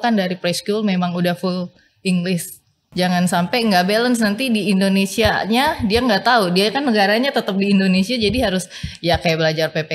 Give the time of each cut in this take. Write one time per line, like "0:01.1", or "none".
0:02.8